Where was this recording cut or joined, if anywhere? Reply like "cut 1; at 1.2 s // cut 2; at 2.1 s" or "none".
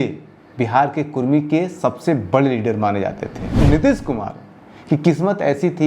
cut 1; at 3.6 s